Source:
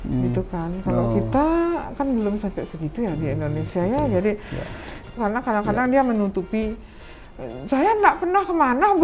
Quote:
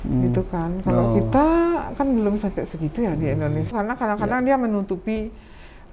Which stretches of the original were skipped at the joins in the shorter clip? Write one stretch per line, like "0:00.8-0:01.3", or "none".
0:03.7-0:05.1

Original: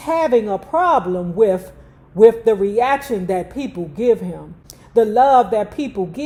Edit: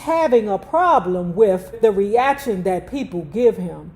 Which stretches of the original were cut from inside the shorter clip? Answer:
0:01.7-0:02.4

